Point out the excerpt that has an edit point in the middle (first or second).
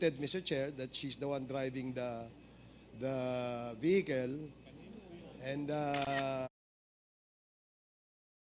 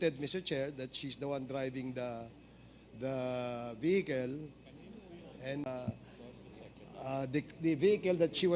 second